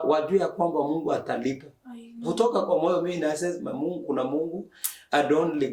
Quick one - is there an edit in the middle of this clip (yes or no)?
no